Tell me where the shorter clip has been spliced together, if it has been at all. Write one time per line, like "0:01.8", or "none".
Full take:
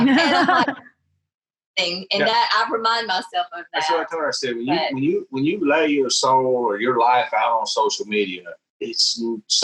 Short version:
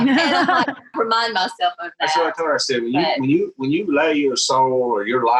0:00.9